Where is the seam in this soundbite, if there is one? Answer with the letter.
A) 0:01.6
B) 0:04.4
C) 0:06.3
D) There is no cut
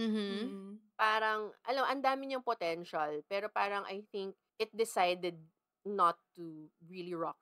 B